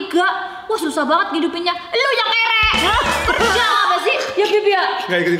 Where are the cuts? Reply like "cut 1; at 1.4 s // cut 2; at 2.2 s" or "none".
none